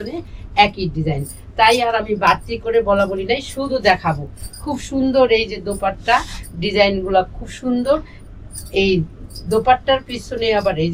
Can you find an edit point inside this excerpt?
no; 0 cuts

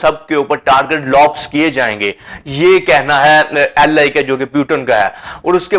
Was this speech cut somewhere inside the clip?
no; 0 cuts

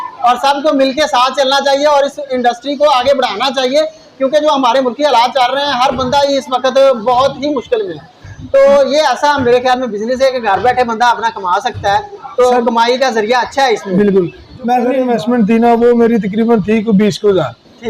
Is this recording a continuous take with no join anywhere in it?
no; 1 cut; at 15.0 s

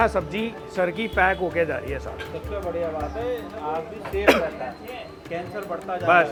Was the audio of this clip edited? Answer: no; 0 cuts

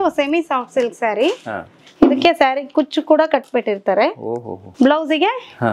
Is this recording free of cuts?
no; 2 cuts; at 1.8 s, 4.6 s

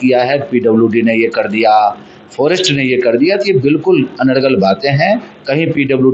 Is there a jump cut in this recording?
no; 0 cuts

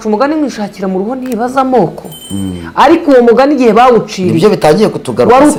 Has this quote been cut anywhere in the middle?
no; 0 cuts

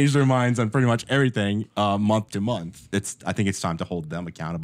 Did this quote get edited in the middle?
yes; 1 cut; at 2.8 s

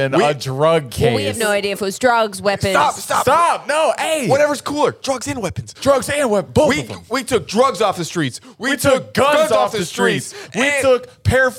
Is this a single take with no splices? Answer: yes; 0 cuts

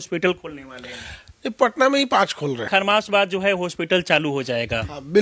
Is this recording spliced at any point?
yes; 1 cut; at 2.7 s

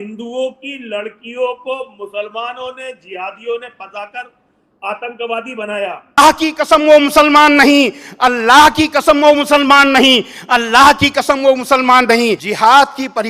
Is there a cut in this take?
yes; 2 cuts; at 6.2 s, 12.5 s

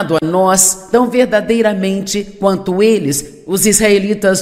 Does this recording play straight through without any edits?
yes; 0 cuts

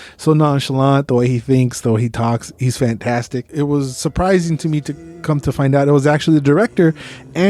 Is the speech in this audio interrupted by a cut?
no; 0 cuts

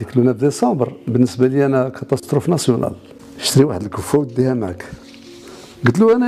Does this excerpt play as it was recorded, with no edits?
no; 1 cut; at 3.1 s

